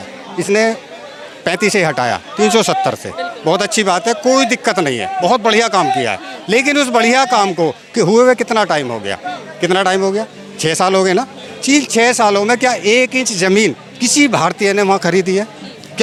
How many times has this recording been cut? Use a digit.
0